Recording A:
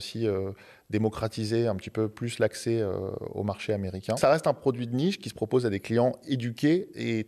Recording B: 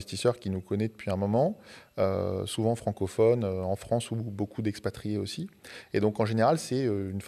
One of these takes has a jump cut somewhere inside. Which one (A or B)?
A